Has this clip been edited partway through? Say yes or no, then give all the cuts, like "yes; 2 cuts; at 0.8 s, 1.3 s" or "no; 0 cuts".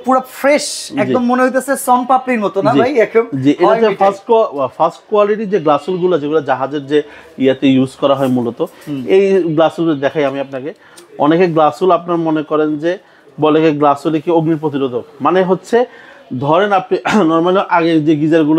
no; 0 cuts